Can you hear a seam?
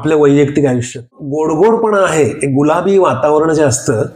yes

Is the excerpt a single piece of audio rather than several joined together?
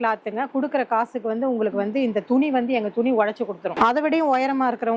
no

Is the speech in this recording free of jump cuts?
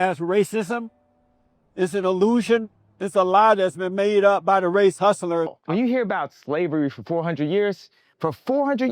no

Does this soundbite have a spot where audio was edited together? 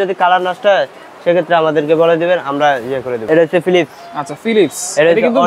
yes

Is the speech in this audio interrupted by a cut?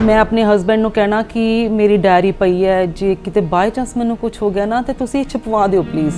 no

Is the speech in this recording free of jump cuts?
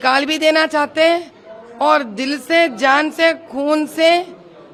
yes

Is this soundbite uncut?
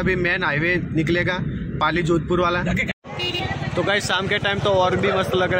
no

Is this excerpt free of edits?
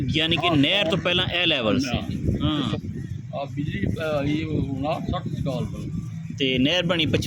no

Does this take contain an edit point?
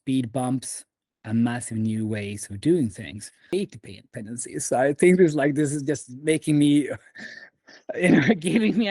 yes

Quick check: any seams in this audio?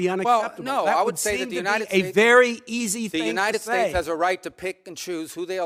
no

